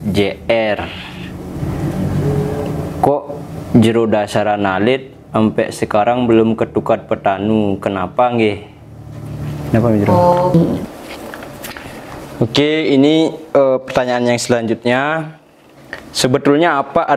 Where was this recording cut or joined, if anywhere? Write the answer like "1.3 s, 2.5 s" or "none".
10.5 s